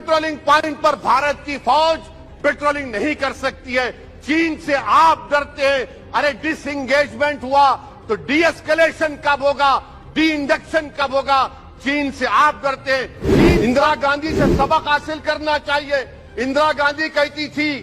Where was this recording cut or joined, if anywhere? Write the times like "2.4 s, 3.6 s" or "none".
13.6 s